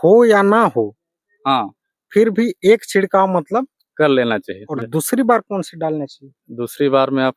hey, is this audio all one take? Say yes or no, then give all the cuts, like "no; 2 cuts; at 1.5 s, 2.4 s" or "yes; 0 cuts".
no; 1 cut; at 4.6 s